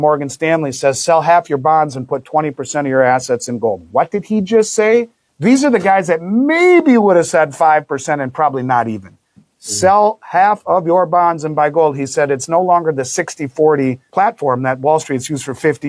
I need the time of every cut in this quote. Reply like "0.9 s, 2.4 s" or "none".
5.2 s, 14.0 s